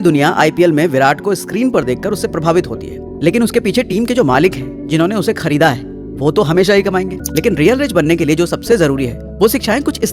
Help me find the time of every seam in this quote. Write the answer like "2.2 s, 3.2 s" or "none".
7.2 s